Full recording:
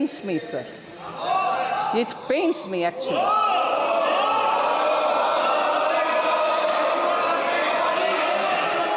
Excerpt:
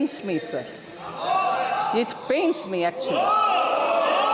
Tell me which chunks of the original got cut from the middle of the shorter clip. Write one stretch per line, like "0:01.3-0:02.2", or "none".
none